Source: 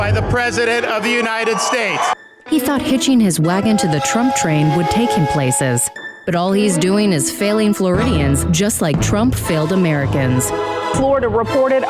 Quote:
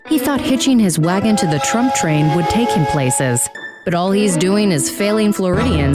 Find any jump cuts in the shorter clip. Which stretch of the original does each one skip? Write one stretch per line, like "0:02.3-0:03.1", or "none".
none